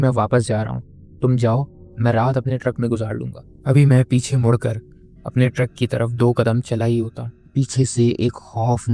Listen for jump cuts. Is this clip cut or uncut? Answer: uncut